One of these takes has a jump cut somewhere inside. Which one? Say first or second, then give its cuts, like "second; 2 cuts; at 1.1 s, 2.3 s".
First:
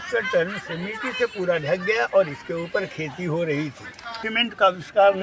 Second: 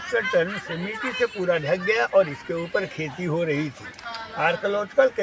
first; 1 cut; at 4.2 s